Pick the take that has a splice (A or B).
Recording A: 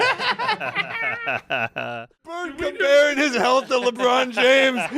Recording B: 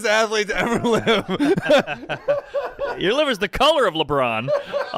A